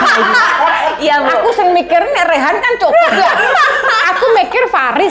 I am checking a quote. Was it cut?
no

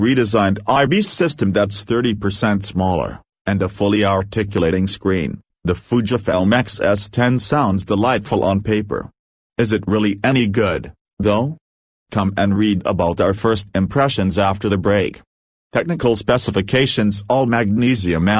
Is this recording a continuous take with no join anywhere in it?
no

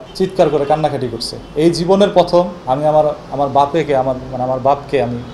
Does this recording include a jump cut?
yes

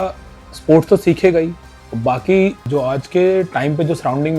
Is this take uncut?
no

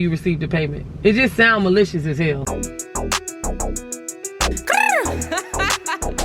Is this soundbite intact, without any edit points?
no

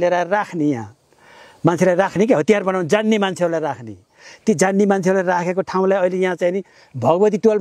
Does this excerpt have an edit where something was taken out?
no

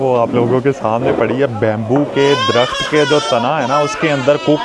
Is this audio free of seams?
yes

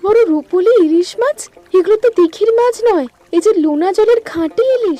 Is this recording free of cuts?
yes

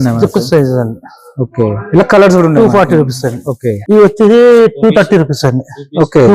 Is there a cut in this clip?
yes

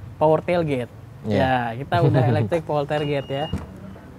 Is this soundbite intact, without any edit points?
yes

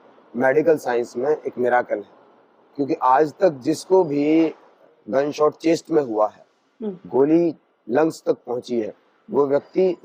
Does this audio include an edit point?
no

